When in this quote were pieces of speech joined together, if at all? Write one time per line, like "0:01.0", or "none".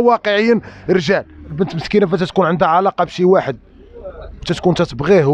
0:01.5